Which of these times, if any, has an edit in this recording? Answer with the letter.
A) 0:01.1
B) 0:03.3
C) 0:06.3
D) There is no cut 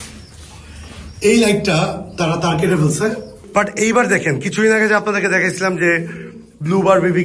B